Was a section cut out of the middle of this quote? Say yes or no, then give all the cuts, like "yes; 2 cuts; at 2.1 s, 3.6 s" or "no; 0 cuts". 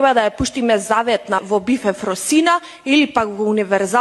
yes; 1 cut; at 1.4 s